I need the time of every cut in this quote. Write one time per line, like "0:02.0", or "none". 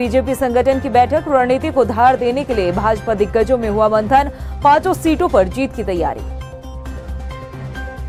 none

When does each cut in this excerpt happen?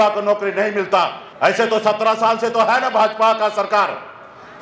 0:01.2

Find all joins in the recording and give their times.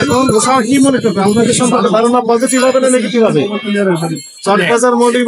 none

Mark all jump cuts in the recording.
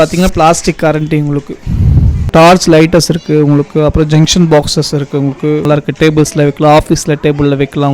0:02.2
0:05.7

